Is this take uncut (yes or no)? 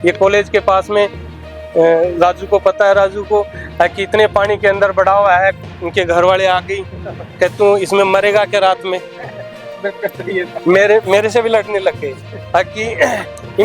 yes